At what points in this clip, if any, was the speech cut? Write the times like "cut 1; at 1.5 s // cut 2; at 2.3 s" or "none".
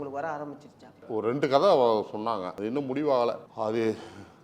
cut 1; at 1.1 s // cut 2; at 2.5 s // cut 3; at 3.5 s